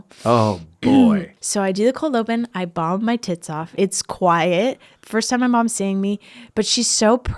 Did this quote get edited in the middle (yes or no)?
yes